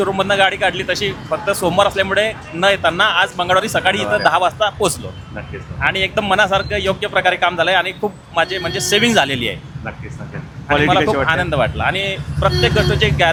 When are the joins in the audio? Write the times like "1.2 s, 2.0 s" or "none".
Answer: none